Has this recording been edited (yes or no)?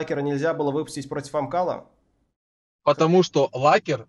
no